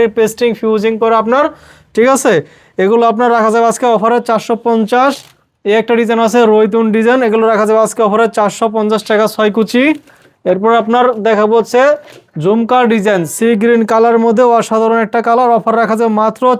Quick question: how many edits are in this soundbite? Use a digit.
0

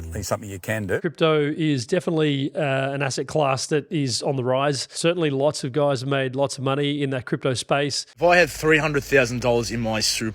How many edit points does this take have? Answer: 3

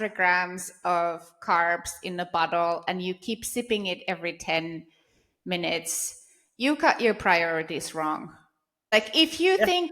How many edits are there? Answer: 1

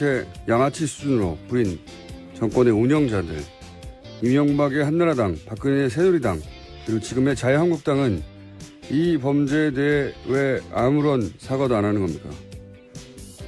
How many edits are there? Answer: 1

